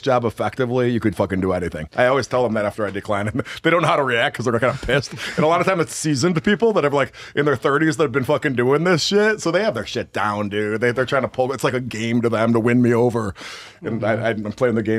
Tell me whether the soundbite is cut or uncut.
uncut